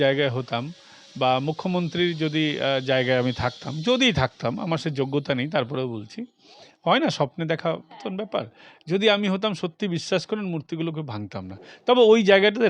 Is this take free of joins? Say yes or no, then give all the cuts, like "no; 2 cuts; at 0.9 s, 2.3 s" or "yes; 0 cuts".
yes; 0 cuts